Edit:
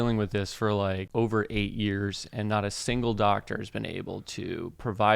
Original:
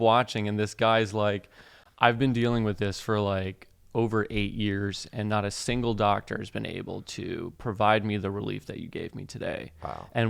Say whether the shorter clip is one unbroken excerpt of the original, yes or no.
no